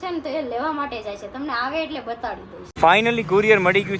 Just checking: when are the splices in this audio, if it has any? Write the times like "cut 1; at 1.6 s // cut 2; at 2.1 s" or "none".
cut 1; at 2.7 s